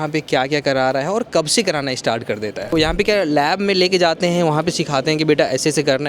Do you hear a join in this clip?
yes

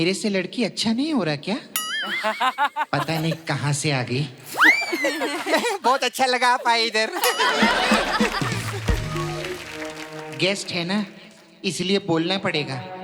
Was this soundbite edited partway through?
no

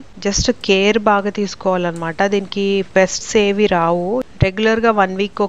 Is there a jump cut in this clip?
yes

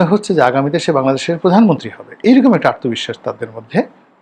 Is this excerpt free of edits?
yes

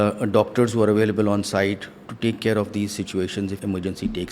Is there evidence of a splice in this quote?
yes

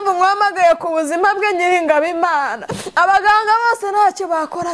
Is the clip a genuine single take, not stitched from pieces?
yes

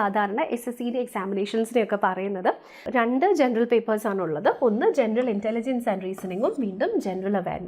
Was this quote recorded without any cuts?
no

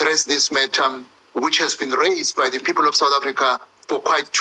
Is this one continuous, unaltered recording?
yes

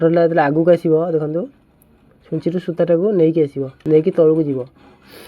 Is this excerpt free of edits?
no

